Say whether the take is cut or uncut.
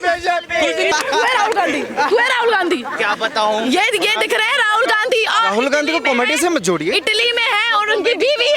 cut